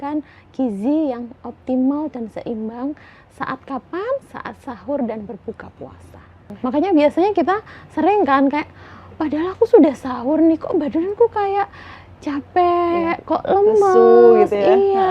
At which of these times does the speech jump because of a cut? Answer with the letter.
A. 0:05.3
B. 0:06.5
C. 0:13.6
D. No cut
B